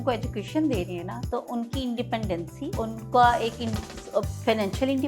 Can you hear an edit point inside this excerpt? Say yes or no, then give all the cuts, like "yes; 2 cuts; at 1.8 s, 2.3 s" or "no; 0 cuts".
yes; 1 cut; at 2.9 s